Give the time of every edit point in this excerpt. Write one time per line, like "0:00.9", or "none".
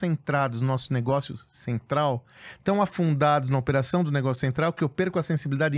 none